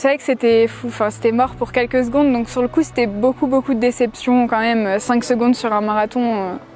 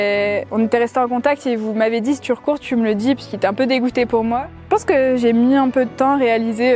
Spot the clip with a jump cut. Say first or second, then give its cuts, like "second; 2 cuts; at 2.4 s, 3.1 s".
second; 1 cut; at 4.5 s